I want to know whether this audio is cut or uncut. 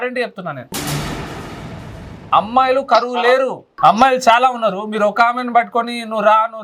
uncut